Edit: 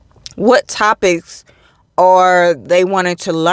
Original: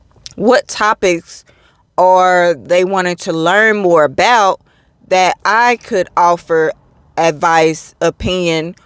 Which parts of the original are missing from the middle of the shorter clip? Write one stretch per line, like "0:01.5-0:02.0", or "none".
none